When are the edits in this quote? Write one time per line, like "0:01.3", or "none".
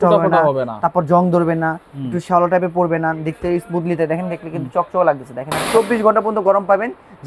0:05.6